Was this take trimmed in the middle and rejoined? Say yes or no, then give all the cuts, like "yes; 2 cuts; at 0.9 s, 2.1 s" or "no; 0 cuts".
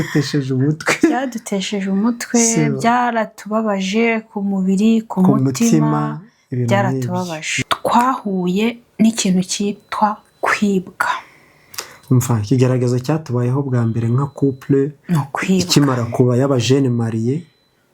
yes; 1 cut; at 7.5 s